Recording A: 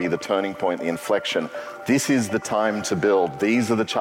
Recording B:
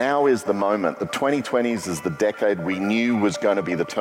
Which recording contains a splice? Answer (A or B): A